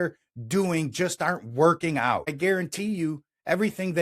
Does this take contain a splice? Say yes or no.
yes